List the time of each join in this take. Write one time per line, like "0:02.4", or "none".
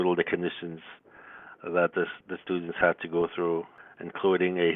0:03.7